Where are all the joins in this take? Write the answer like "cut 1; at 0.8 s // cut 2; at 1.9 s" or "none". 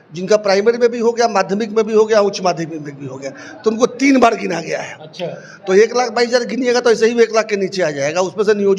none